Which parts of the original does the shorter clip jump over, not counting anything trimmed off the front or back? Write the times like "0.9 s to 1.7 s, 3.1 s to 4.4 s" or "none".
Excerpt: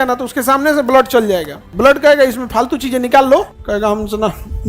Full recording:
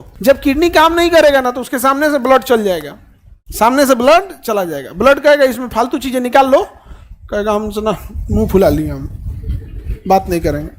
3.0 s to 4.8 s, 6.8 s to 7.2 s